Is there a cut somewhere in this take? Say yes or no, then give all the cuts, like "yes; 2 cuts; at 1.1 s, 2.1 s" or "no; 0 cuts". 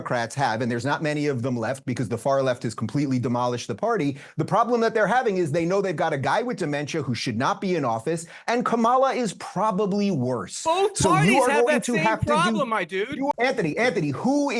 yes; 1 cut; at 13.3 s